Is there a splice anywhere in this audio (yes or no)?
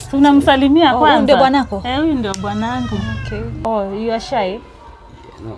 yes